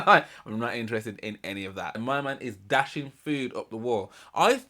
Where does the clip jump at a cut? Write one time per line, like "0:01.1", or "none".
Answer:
0:01.9